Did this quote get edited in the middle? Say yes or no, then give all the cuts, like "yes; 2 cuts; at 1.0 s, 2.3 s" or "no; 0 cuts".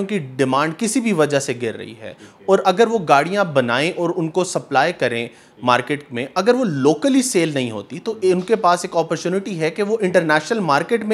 no; 0 cuts